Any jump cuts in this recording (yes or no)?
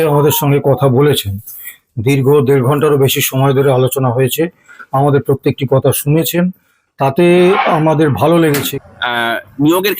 yes